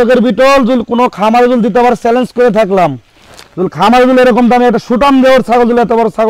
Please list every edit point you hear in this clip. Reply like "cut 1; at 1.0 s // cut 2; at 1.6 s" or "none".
none